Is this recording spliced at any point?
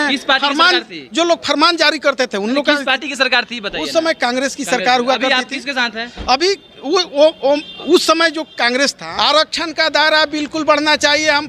yes; 1 cut; at 9.0 s

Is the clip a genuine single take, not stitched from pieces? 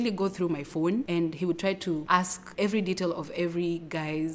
no; 2 cuts; at 1.1 s, 2.3 s

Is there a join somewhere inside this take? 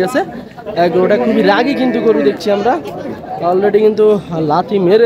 no; 0 cuts

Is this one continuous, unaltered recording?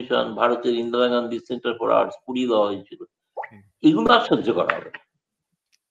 yes; 0 cuts

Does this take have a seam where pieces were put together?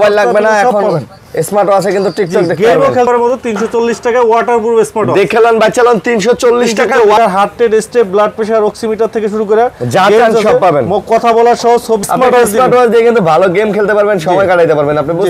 yes; 3 cuts; at 3.1 s, 7.2 s, 12.0 s

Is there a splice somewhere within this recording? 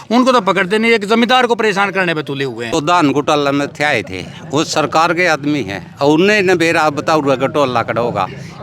yes; 1 cut; at 2.7 s

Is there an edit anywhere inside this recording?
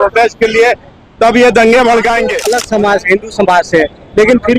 yes; 1 cut; at 2.4 s

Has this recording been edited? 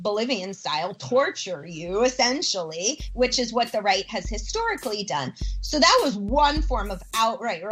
no; 0 cuts

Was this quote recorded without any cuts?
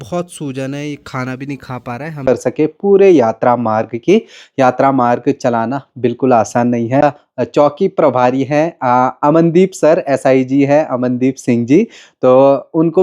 no; 2 cuts; at 2.3 s, 7.0 s

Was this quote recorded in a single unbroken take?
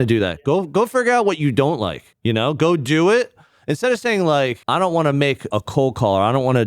no; 3 cuts; at 2.1 s, 4.6 s, 5.5 s

